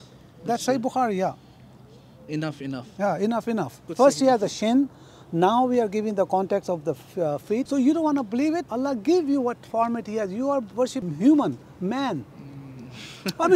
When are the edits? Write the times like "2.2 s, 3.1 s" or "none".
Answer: 3.9 s, 7.7 s, 8.7 s, 11.0 s